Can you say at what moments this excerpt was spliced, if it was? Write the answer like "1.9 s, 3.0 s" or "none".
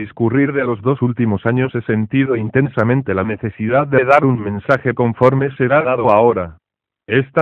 none